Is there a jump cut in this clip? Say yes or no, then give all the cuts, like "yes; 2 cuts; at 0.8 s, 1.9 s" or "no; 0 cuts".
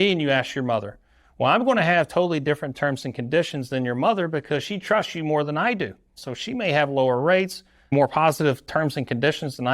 yes; 2 cuts; at 6.2 s, 7.8 s